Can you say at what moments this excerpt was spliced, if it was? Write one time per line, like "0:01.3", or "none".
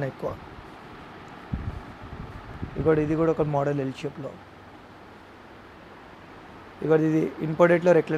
none